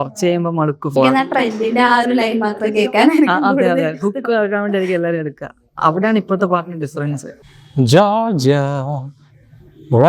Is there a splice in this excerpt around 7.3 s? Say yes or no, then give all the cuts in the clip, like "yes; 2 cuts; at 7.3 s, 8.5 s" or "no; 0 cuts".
yes; 2 cuts; at 1.0 s, 7.3 s